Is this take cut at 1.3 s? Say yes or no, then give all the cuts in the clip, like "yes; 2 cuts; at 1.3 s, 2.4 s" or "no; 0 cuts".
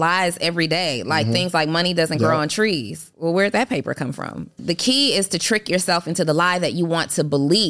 no; 2 cuts; at 3.0 s, 4.6 s